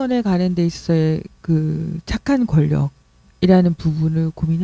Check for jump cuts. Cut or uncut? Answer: uncut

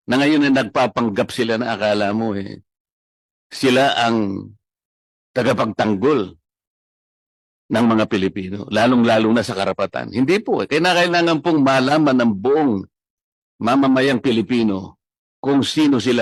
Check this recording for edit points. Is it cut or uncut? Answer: uncut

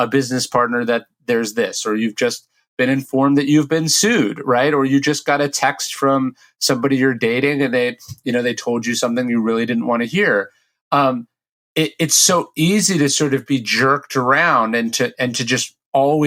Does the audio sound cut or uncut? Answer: uncut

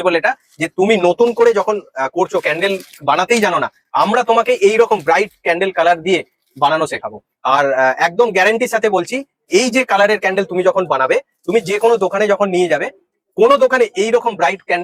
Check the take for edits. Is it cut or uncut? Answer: uncut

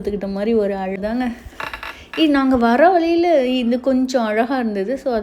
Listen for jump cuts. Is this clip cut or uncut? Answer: cut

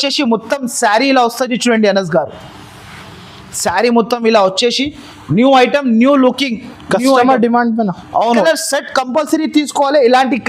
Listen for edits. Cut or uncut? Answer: cut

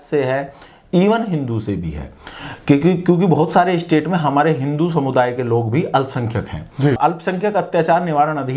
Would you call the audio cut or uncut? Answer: cut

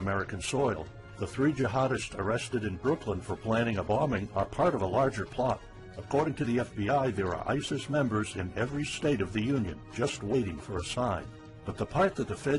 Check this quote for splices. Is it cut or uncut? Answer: uncut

